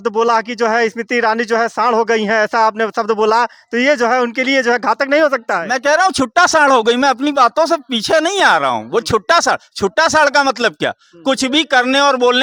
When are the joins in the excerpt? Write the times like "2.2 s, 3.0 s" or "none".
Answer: none